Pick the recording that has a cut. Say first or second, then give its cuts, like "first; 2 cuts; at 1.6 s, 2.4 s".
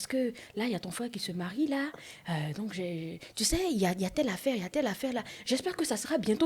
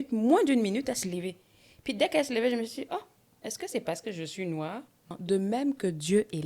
second; 1 cut; at 5.1 s